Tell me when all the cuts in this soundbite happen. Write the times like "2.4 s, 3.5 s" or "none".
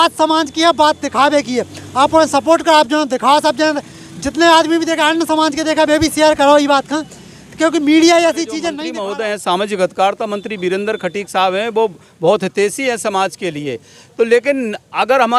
8.7 s